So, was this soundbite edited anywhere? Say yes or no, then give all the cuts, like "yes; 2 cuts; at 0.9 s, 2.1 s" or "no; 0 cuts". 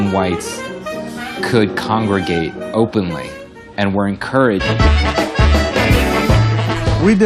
no; 0 cuts